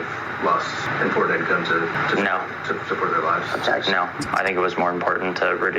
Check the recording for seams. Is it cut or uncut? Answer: cut